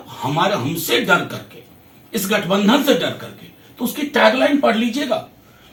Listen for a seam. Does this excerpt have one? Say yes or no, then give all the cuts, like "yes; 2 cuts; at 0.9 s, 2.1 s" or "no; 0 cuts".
no; 0 cuts